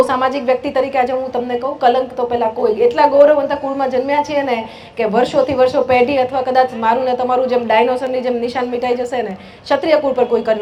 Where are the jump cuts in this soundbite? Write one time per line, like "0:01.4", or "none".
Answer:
none